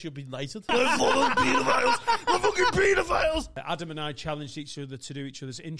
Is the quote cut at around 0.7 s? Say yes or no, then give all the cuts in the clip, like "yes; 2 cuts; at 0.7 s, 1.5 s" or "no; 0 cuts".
yes; 2 cuts; at 0.7 s, 3.6 s